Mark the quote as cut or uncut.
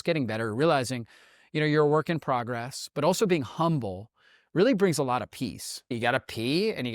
cut